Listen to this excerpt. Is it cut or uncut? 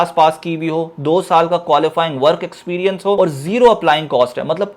cut